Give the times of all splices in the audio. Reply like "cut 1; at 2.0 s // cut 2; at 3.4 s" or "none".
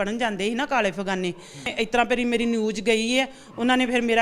cut 1; at 1.7 s